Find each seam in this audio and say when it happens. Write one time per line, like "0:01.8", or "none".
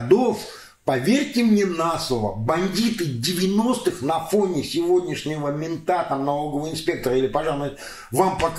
none